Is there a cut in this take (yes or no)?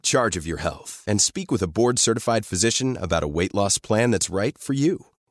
no